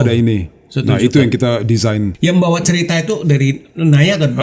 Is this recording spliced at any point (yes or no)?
yes